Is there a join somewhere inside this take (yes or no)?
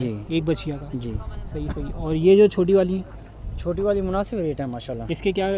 no